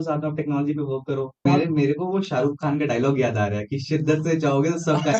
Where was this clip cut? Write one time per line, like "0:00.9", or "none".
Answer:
0:01.4